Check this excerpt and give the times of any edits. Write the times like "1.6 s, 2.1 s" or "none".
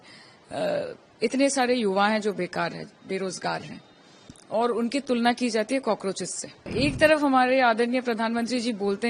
6.7 s